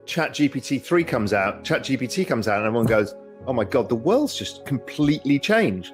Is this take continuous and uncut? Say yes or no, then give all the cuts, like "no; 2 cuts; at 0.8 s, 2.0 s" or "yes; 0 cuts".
yes; 0 cuts